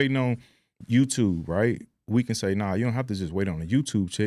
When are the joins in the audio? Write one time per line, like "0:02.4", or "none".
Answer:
none